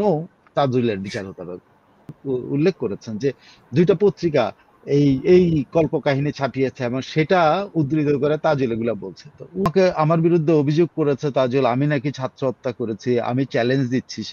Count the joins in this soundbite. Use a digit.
2